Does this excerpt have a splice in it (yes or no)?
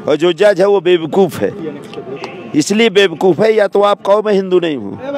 no